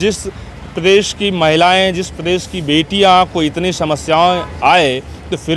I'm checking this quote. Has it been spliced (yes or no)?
no